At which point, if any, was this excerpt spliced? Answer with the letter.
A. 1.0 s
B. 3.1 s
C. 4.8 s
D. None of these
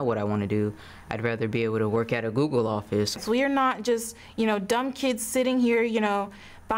B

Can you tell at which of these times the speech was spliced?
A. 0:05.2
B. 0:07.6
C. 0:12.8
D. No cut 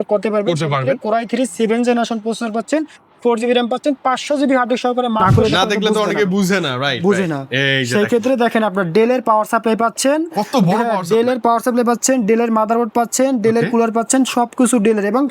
A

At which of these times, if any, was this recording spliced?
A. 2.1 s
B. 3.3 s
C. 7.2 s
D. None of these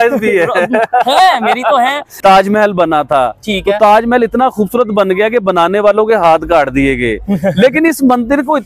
A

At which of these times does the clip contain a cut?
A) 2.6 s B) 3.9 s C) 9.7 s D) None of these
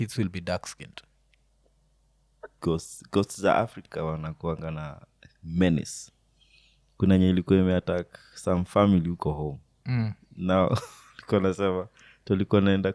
A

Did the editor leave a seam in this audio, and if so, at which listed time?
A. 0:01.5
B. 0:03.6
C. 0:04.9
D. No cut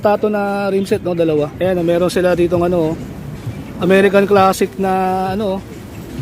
A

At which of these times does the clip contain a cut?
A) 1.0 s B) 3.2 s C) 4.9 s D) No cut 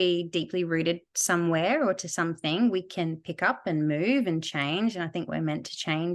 D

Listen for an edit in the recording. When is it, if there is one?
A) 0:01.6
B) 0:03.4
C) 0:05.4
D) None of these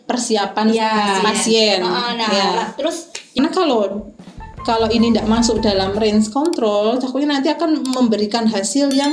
B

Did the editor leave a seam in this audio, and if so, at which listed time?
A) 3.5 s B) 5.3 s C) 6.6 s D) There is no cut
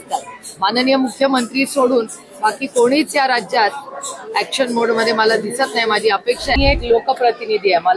C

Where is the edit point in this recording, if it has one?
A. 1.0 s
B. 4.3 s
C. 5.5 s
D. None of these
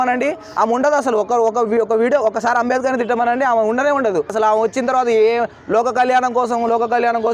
B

